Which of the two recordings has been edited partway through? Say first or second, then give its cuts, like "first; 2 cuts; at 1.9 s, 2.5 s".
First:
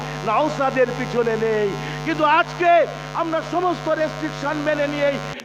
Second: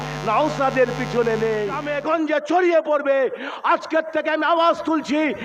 second; 1 cut; at 1.9 s